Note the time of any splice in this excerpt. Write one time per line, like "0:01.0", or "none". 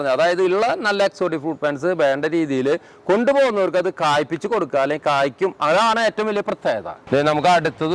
0:07.0